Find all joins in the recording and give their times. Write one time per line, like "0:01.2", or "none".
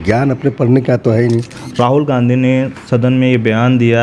0:01.6